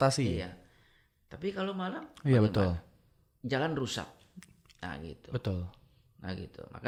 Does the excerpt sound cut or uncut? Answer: uncut